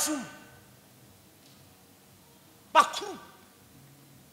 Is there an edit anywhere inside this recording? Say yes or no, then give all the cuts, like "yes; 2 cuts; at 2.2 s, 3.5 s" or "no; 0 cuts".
no; 0 cuts